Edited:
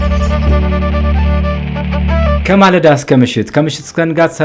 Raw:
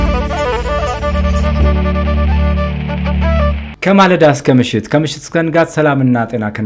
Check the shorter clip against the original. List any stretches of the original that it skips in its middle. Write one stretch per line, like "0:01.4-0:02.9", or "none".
0:03.5-0:03.8